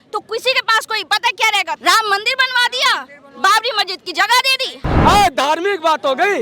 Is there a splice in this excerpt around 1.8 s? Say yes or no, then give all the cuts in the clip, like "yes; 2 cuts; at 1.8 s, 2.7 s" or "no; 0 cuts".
yes; 2 cuts; at 1.8 s, 4.8 s